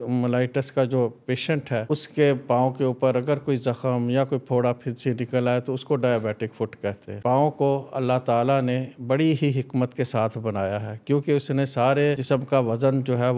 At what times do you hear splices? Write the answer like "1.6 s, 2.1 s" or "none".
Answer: 1.8 s, 7.1 s, 12.2 s

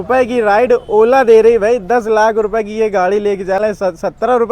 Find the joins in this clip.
none

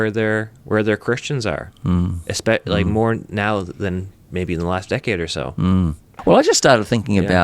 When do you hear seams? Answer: 6.1 s

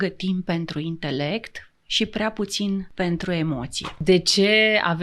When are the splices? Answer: 2.9 s, 4.0 s

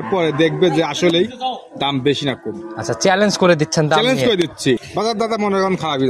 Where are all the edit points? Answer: 4.8 s

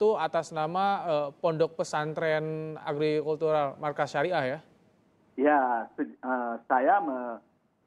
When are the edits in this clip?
none

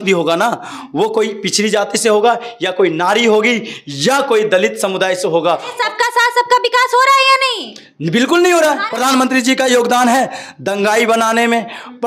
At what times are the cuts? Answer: 5.7 s, 8.9 s

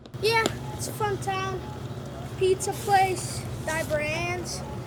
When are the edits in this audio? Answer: none

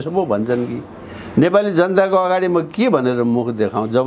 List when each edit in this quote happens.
none

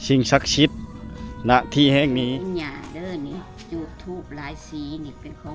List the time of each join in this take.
2.3 s

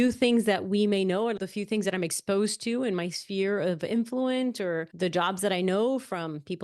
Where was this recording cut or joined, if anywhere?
1.4 s, 4.9 s

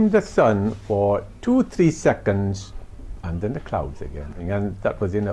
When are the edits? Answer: 4.4 s

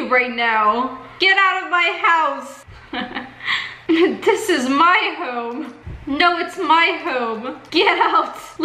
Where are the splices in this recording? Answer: none

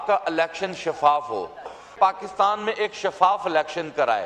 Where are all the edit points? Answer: 1.9 s

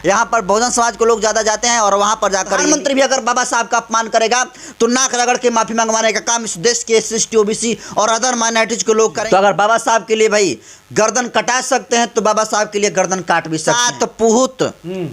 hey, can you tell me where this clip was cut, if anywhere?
2.6 s, 9.2 s, 13.7 s

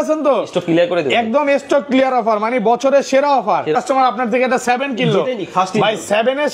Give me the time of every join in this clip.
3.8 s

